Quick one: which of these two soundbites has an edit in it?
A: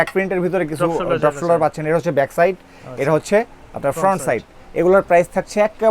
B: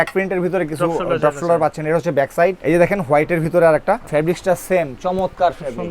B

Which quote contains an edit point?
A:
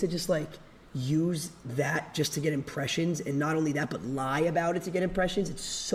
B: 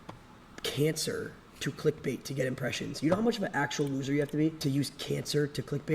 B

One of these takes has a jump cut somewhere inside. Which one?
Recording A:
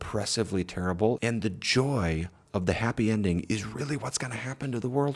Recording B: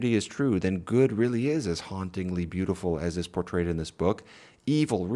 A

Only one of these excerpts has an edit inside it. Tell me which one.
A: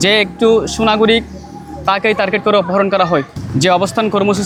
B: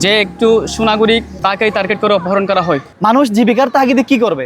B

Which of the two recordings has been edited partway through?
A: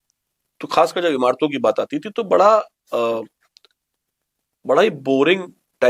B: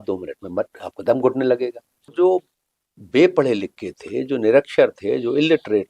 B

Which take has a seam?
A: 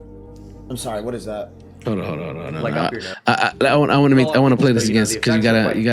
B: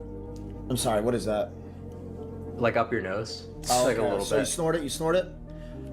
B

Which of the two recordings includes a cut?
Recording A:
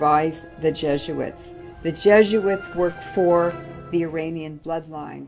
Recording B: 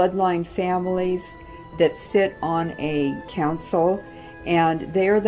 B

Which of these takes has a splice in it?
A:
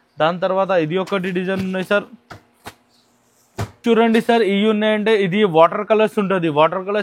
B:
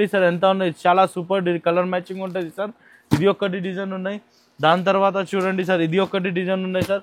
A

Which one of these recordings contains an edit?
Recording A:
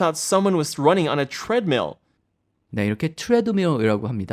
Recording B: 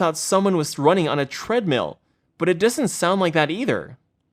B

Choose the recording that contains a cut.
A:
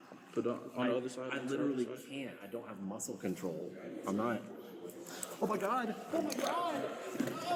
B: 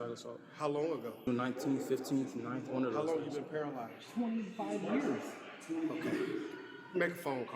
B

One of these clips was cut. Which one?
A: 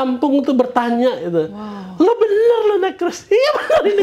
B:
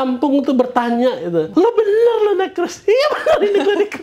B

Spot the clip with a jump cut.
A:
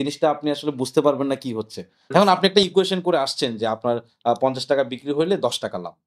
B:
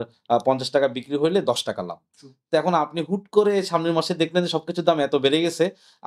A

